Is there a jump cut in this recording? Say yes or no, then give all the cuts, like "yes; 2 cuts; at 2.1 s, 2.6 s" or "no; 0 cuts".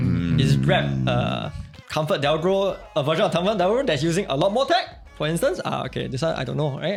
no; 0 cuts